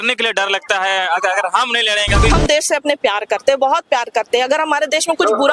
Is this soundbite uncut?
no; 1 cut; at 2.3 s

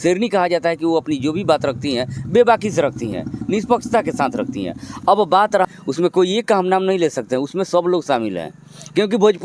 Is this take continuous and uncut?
no; 1 cut; at 5.7 s

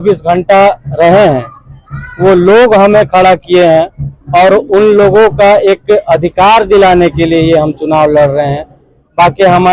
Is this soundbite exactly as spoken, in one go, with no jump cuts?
yes; 0 cuts

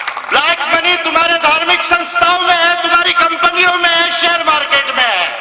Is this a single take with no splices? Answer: yes; 0 cuts

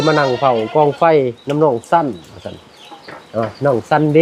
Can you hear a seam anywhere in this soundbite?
no; 0 cuts

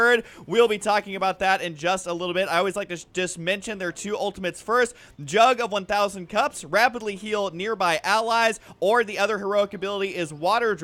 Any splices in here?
yes; 1 cut; at 8.7 s

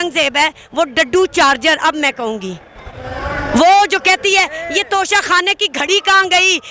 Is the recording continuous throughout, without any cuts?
yes; 0 cuts

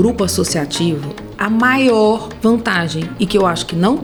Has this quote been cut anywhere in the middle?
no; 0 cuts

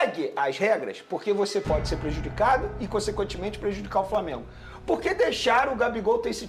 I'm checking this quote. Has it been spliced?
no; 0 cuts

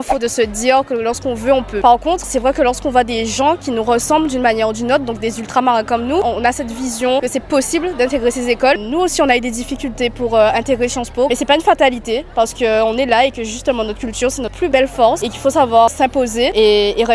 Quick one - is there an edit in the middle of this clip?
yes; 2 cuts; at 6.2 s, 8.8 s

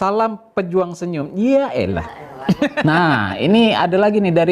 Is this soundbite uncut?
no; 1 cut; at 2.8 s

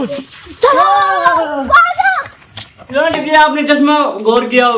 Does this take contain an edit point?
yes; 1 cut; at 3.1 s

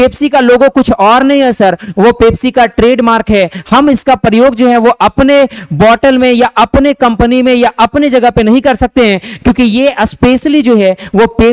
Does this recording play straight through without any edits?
yes; 0 cuts

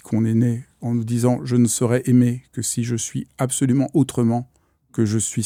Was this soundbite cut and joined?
no; 0 cuts

